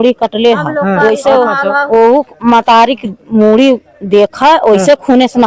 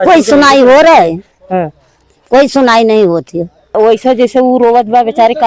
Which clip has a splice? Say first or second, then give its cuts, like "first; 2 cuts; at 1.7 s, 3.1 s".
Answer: second; 1 cut; at 3.8 s